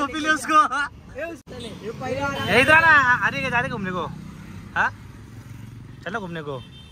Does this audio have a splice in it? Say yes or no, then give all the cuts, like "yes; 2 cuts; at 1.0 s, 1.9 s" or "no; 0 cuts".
yes; 1 cut; at 1.4 s